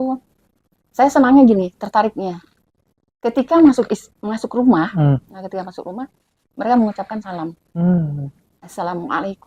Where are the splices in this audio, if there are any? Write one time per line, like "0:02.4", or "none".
none